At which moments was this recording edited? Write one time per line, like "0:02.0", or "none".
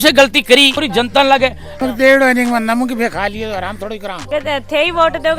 0:01.7
0:04.2